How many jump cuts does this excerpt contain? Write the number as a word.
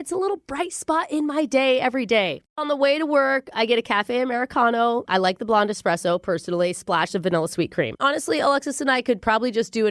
two